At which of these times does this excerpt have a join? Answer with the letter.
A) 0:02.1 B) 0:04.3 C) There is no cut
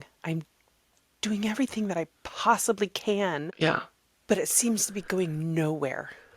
C